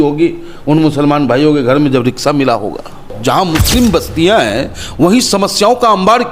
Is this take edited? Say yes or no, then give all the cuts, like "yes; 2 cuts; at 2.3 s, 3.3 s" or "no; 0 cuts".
yes; 1 cut; at 3.1 s